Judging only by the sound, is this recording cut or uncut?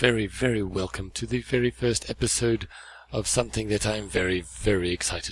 cut